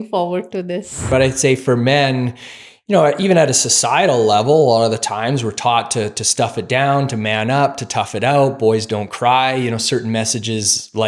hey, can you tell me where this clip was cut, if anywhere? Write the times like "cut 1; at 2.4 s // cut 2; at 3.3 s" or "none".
cut 1; at 1.1 s